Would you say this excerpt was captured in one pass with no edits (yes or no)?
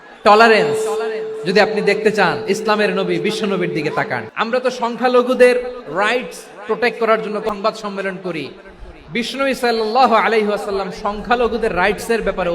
no